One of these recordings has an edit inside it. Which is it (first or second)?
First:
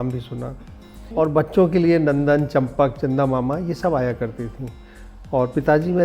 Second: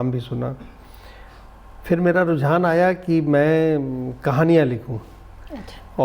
first